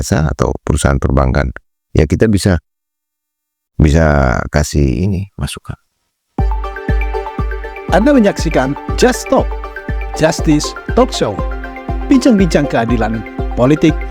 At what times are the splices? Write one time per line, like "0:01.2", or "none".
0:06.3